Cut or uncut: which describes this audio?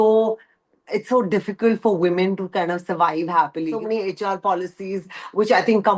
cut